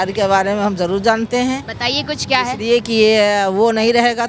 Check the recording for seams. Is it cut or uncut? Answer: uncut